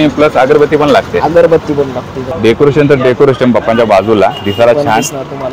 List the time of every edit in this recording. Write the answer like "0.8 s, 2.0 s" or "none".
2.2 s